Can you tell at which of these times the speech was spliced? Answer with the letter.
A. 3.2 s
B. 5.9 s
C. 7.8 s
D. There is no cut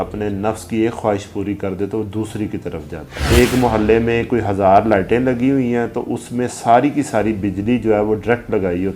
A